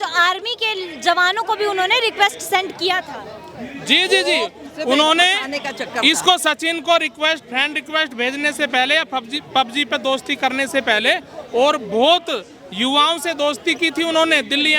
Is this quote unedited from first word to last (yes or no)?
yes